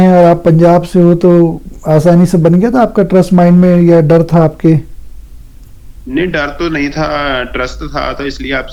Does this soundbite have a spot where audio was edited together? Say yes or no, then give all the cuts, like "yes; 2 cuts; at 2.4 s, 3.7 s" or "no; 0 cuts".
no; 0 cuts